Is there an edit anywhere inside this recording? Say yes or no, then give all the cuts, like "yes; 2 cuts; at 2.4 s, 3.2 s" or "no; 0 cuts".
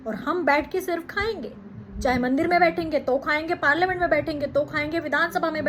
no; 0 cuts